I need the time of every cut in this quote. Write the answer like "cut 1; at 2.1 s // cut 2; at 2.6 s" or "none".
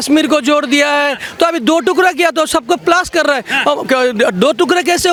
none